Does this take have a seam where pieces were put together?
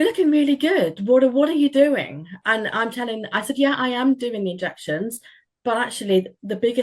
yes; 1 cut; at 2.4 s

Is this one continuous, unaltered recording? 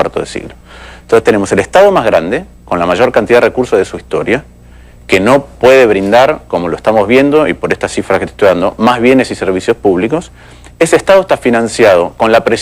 no; 1 cut; at 9.6 s

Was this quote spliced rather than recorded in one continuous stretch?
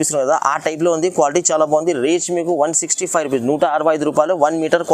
no; 0 cuts

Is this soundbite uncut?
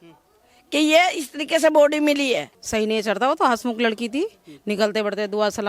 no; 1 cut; at 2.6 s

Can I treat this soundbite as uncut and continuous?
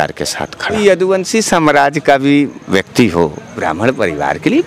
no; 3 cuts; at 0.8 s, 2.6 s, 3.7 s

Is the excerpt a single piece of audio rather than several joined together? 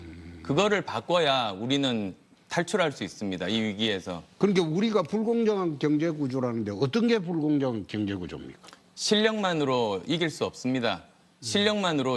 no; 1 cut; at 9.0 s

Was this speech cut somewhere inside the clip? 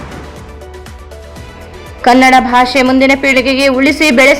no; 0 cuts

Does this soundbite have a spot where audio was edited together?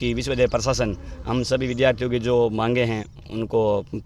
no; 0 cuts

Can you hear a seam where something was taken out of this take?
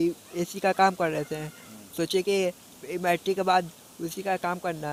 no; 0 cuts

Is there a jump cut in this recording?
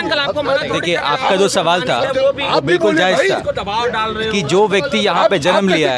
no; 0 cuts

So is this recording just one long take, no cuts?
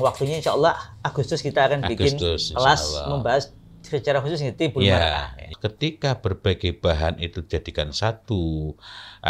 no; 1 cut; at 5.6 s

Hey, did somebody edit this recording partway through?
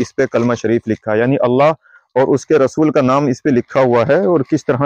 no; 0 cuts

